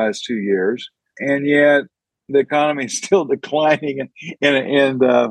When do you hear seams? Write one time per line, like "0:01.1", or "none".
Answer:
0:01.2